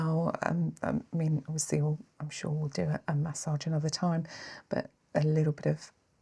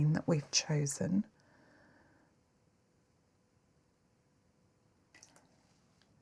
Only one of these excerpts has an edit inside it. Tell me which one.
second; 1 cut; at 5.1 s

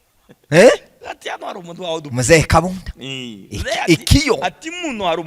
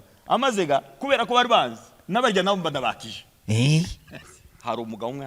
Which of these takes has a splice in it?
second; 1 cut; at 4.2 s

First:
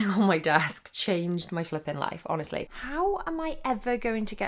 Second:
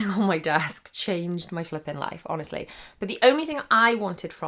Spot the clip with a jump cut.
first; 1 cut; at 2.8 s

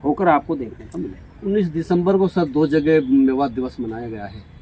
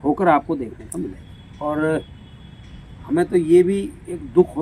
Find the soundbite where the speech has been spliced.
second; 1 cut; at 1.2 s

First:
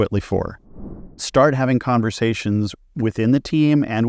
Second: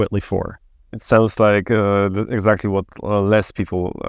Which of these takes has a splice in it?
first; 1 cut; at 1.1 s

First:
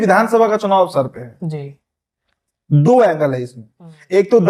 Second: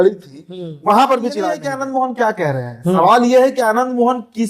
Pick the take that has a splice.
second; 1 cut; at 1.7 s

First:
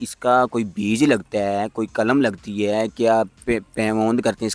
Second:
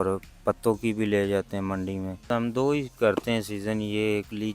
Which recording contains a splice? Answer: second; 1 cut; at 2.3 s

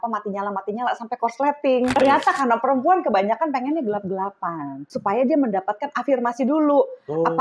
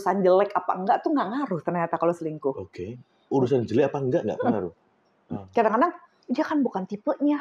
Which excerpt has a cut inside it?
first; 2 cuts; at 1.9 s, 4.9 s

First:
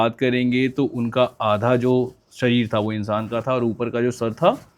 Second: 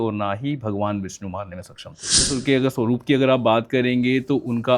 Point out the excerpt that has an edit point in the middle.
second; 1 cut; at 2.3 s

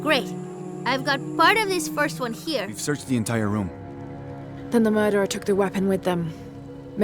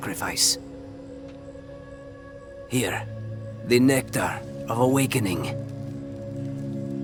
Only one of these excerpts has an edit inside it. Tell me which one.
first; 1 cut; at 2.7 s

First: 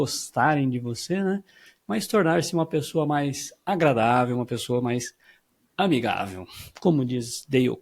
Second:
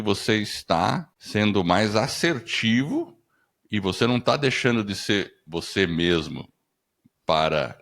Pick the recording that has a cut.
second; 1 cut; at 1.1 s

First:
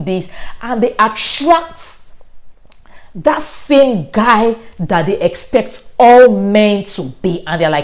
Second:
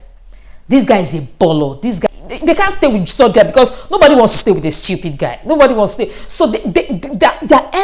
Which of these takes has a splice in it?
second; 1 cut; at 2.1 s

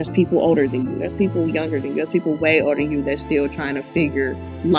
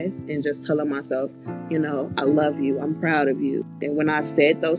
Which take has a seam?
second; 1 cut; at 3.8 s

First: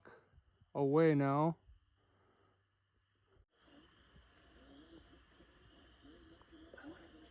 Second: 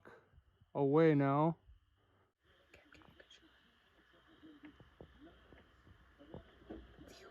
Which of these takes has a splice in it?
second; 1 cut; at 2.4 s

